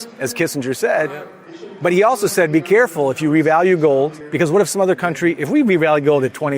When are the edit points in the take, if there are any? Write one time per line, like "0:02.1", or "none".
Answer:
0:04.2